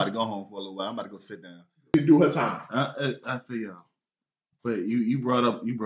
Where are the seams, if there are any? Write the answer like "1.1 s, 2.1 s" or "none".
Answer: 1.9 s

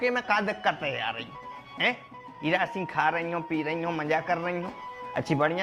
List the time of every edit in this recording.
none

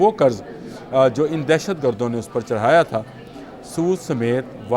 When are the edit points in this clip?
none

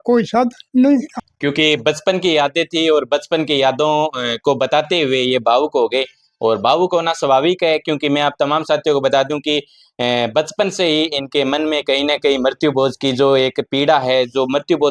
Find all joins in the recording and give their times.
1.2 s

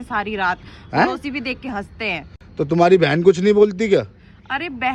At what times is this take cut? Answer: none

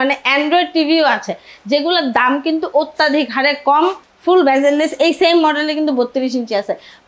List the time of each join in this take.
4.1 s

